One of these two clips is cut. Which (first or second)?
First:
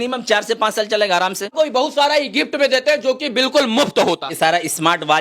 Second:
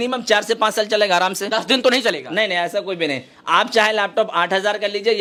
first